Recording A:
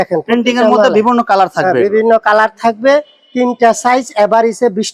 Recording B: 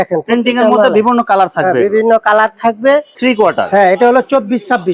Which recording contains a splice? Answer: B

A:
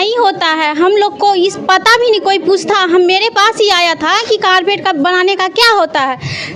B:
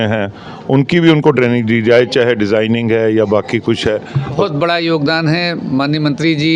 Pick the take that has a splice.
B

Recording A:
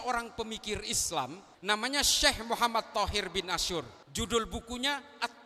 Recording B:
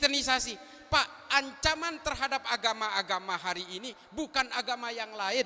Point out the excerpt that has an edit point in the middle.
A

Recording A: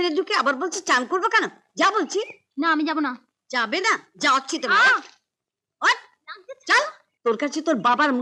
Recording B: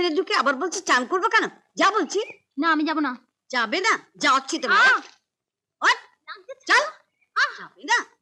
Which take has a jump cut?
A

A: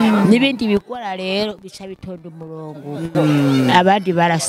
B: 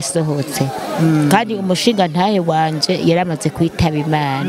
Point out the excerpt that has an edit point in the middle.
A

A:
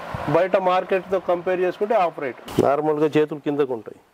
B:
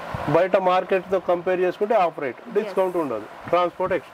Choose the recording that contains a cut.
A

